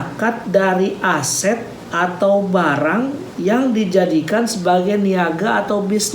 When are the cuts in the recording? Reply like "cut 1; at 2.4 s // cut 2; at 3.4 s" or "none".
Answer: cut 1; at 1.8 s // cut 2; at 3.2 s